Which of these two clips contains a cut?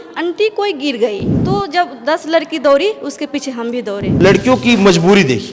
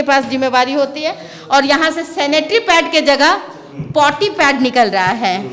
first; 2 cuts; at 1.3 s, 4.1 s

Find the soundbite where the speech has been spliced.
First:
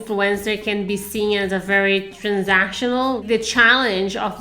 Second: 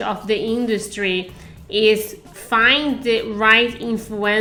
first; 1 cut; at 3.2 s

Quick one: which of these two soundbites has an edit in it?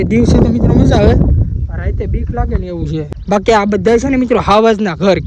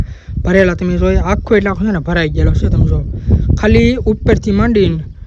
first; 1 cut; at 3.1 s

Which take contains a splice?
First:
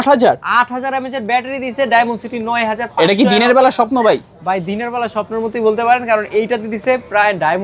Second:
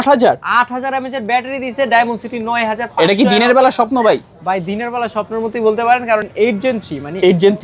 second; 1 cut; at 6.3 s

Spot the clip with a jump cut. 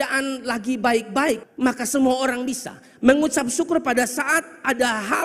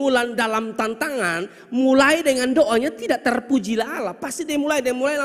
first; 1 cut; at 1.5 s

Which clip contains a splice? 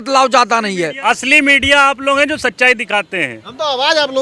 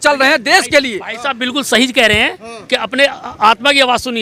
first; 1 cut; at 1.0 s

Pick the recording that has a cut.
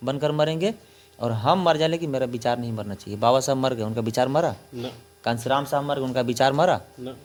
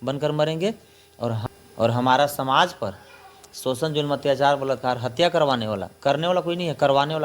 second; 1 cut; at 1.4 s

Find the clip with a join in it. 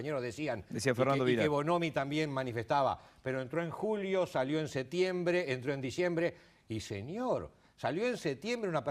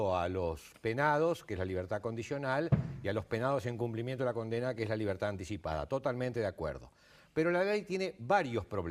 second; 1 cut; at 5.6 s

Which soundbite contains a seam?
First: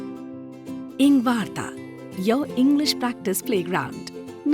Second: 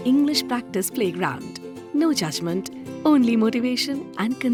first; 1 cut; at 0.9 s

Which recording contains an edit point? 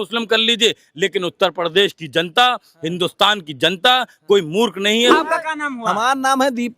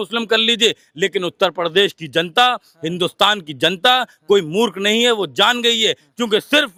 first; 1 cut; at 5.1 s

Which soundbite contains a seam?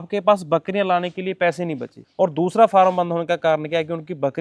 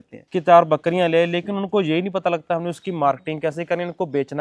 first; 1 cut; at 1.9 s

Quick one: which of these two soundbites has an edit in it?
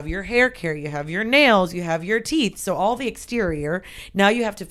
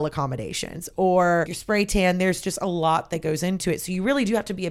second; 1 cut; at 1.6 s

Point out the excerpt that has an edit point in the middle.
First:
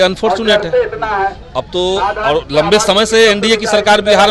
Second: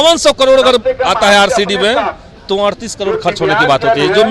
second; 1 cut; at 1.2 s

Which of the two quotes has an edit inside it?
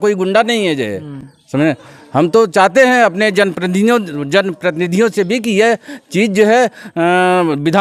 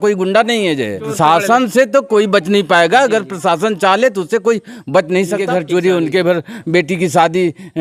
second; 2 cuts; at 1.0 s, 5.4 s

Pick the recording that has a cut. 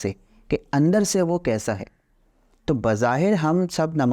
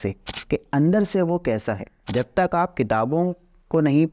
second; 1 cut; at 1.9 s

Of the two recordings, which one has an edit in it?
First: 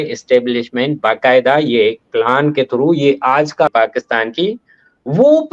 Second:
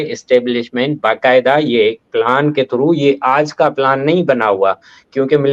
first; 1 cut; at 3.7 s

